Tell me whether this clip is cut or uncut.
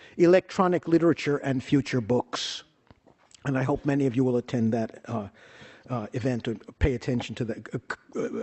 cut